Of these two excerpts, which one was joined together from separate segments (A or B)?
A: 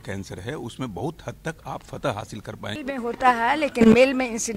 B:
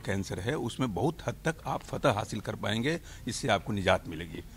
A